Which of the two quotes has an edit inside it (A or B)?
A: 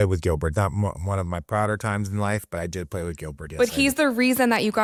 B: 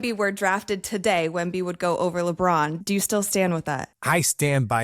B